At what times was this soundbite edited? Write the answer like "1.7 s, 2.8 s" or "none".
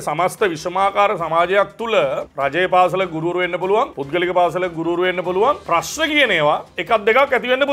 2.3 s, 4.0 s, 5.6 s, 6.7 s